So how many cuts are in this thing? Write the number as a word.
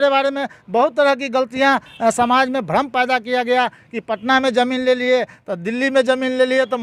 zero